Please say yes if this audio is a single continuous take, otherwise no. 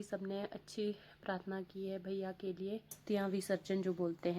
no